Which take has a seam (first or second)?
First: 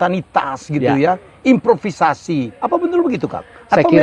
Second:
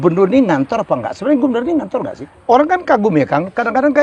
second